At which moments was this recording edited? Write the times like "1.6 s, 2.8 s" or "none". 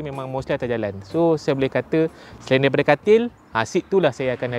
none